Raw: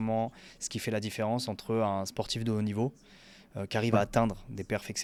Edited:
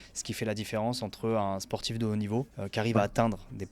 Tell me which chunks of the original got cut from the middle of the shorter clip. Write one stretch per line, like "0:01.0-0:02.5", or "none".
0:03.0-0:03.6